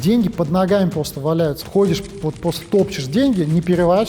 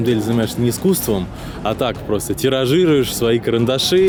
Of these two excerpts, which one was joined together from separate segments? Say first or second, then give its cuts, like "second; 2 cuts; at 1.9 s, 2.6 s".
first; 1 cut; at 1.6 s